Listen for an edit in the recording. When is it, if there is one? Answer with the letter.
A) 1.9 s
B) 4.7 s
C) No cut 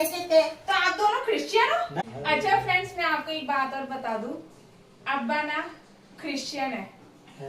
A